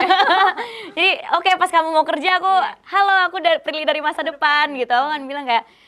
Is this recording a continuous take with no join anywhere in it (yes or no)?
yes